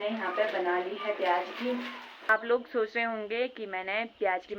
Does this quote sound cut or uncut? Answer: cut